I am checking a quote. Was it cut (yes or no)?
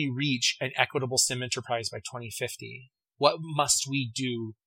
yes